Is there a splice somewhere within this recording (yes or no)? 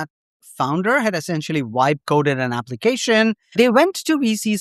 yes